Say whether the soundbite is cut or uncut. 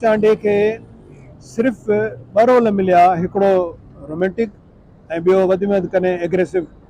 uncut